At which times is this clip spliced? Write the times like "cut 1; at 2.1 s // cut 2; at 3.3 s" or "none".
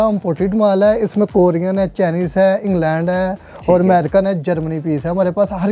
none